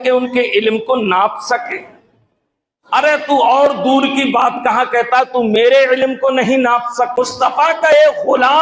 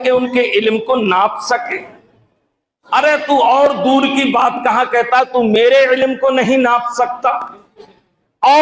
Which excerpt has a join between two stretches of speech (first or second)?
first